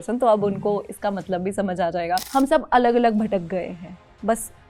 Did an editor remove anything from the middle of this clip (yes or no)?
yes